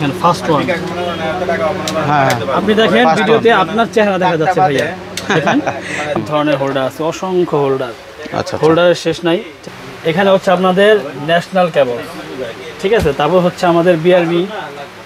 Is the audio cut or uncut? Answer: cut